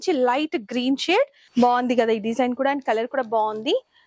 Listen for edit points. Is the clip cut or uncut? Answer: cut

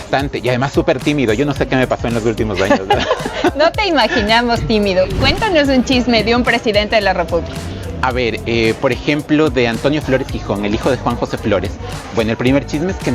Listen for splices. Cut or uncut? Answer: cut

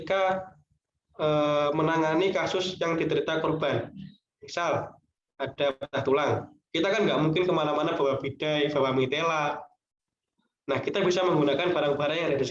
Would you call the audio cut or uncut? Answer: uncut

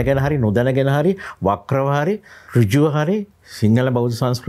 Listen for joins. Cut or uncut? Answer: uncut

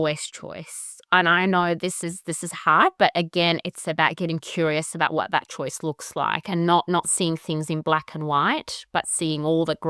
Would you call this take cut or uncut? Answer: uncut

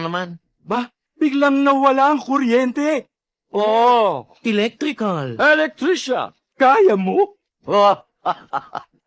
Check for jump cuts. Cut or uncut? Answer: uncut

